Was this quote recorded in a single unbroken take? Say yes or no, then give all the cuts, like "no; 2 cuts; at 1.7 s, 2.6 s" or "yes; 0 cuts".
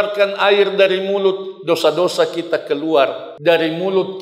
no; 1 cut; at 3.3 s